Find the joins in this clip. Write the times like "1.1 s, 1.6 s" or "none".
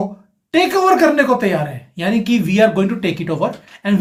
none